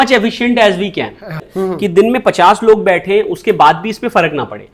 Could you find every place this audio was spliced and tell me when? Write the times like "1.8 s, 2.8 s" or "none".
1.5 s